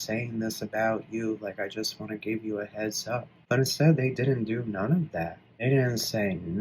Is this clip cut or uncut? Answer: cut